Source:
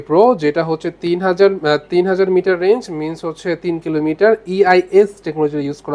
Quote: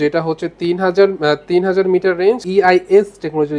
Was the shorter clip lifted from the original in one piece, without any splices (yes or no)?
no